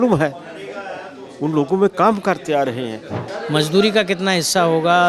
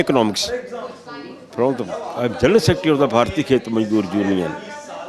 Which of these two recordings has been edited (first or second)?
first